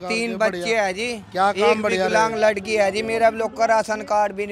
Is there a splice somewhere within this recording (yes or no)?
no